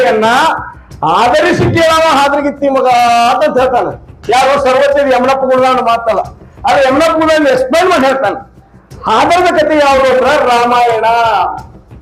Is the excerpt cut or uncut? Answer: uncut